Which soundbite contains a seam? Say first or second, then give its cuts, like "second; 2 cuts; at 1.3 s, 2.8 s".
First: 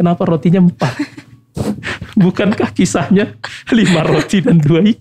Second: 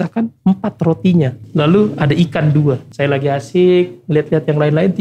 second; 2 cuts; at 1.4 s, 2.9 s